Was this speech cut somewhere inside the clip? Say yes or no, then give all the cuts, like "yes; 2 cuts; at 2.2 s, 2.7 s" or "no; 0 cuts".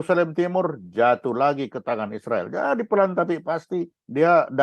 no; 0 cuts